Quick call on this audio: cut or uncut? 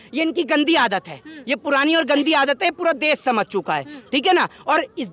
uncut